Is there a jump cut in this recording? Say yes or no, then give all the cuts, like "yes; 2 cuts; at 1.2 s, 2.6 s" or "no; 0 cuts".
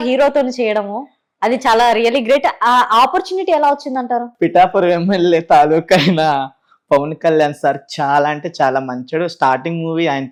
no; 0 cuts